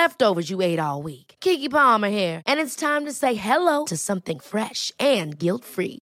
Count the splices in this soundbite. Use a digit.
0